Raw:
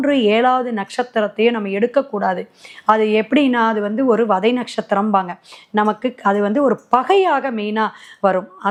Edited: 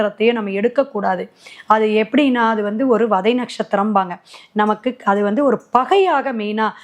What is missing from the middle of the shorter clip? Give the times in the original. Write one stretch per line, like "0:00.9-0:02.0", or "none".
none